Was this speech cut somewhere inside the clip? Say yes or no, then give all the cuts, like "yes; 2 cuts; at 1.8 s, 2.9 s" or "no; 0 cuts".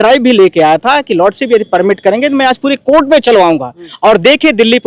no; 0 cuts